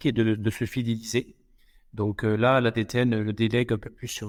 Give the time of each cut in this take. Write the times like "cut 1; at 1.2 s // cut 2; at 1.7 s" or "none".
none